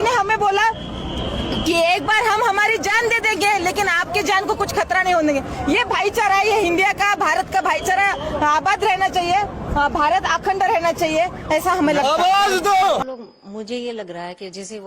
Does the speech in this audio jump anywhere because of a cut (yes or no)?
yes